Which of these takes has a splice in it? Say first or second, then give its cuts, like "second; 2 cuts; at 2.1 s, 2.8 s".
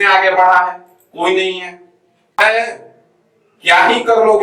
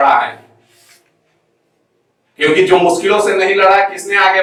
first; 1 cut; at 2.4 s